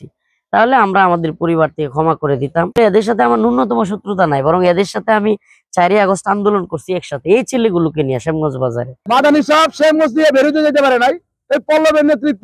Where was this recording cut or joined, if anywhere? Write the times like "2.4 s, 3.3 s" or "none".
8.9 s